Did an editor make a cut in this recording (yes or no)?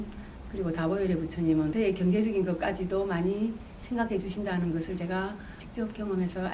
no